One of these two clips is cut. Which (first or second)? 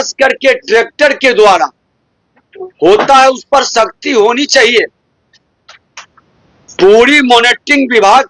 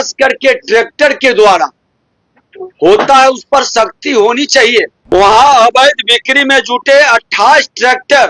second